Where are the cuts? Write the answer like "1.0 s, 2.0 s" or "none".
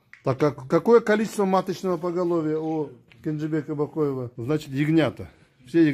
4.3 s

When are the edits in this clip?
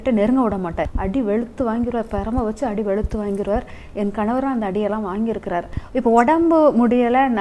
0.8 s, 5.8 s

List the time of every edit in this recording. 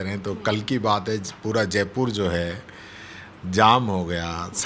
none

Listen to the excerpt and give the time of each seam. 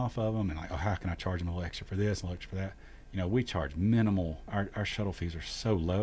4.4 s

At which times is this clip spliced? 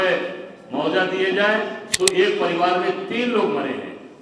1.8 s

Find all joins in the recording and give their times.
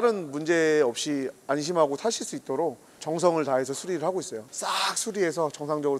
4.4 s

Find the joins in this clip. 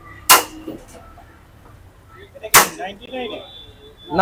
none

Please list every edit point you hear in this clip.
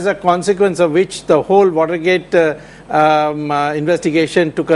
3.3 s

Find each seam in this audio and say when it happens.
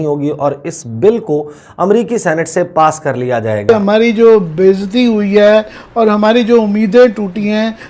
3.7 s

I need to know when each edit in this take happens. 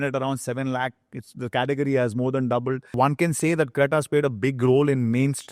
2.9 s

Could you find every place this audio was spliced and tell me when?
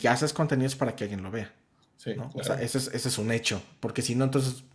none

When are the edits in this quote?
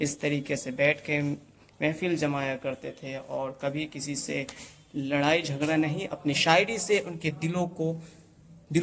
none

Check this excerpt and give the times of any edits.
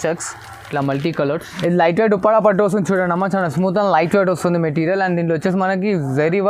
1.5 s

